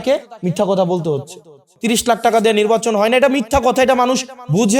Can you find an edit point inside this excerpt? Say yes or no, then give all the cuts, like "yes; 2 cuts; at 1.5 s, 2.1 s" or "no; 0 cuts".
yes; 1 cut; at 1.7 s